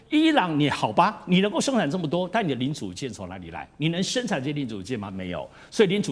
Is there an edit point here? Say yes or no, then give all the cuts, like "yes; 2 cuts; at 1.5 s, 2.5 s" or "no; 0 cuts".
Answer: no; 0 cuts